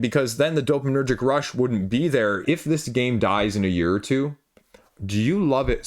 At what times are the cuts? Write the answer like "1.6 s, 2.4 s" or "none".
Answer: 2.4 s